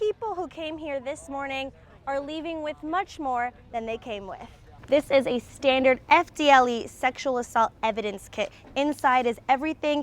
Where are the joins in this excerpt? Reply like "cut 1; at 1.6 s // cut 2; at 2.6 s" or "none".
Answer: cut 1; at 4.7 s